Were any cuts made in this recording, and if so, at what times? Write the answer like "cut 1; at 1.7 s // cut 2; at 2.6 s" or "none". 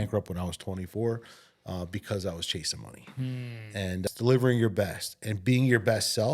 cut 1; at 4.1 s